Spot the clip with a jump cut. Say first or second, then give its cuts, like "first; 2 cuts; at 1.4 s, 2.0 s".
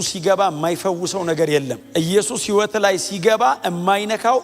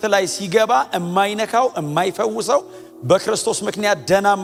first; 1 cut; at 1.8 s